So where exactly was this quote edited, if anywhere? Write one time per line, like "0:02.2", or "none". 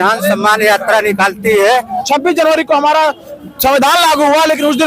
0:01.9

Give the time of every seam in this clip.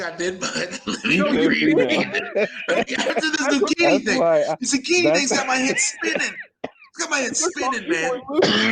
none

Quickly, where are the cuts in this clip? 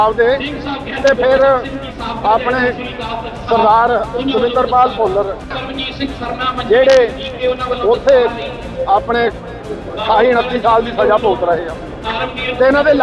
0:05.6

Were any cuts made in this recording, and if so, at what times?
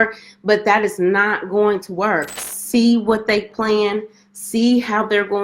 0:02.4

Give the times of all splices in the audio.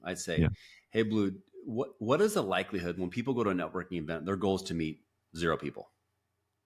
none

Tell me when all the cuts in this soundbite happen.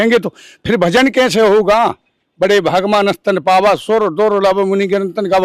none

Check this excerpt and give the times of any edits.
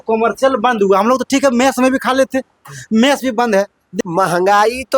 0:03.8

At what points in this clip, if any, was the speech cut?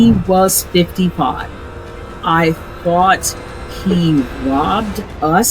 0:01.5

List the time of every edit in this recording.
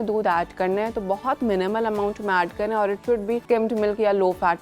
0:03.4

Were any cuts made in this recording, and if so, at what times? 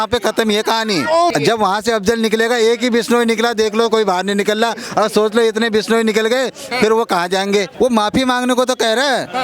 0:01.3
0:07.7

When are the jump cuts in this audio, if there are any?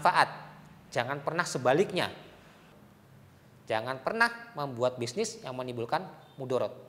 0:02.6

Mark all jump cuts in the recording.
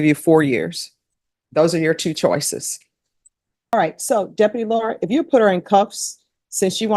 0:03.7

